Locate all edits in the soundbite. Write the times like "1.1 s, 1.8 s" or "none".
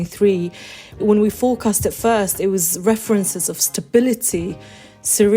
1.0 s